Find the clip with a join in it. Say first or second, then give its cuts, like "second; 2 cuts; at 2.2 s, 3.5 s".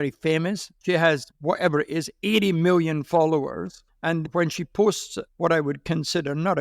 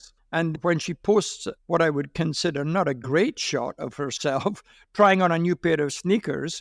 first; 1 cut; at 1.0 s